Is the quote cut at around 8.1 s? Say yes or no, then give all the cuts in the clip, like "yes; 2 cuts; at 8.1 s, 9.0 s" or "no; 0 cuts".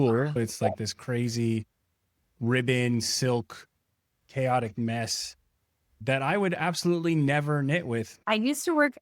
yes; 1 cut; at 8.1 s